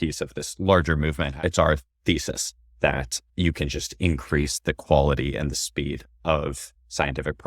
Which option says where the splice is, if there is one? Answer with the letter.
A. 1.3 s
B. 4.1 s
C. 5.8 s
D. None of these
A